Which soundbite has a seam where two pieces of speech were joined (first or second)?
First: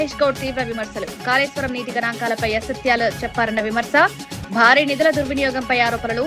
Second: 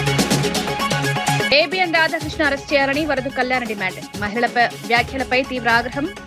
second